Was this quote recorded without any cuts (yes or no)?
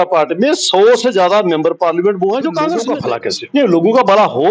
no